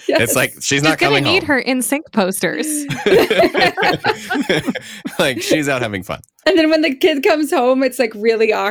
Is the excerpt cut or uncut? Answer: cut